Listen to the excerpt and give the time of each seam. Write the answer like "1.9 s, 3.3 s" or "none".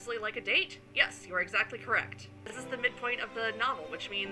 2.4 s